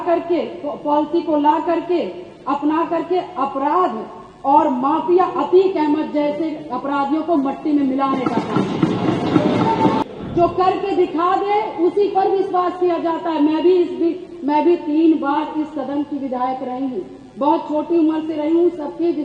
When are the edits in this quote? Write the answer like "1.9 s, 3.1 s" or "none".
10.0 s